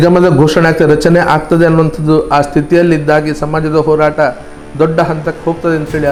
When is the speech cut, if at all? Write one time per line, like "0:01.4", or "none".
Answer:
none